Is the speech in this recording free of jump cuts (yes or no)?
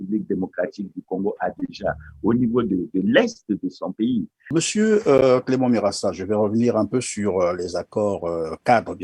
no